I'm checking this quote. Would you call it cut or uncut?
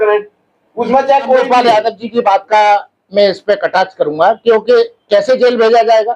cut